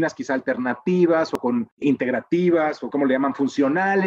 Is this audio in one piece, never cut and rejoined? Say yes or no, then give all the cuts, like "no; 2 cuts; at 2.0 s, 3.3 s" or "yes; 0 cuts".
no; 2 cuts; at 1.4 s, 2.9 s